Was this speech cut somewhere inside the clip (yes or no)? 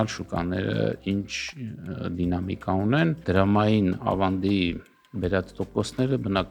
yes